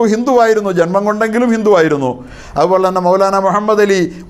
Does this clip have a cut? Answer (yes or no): no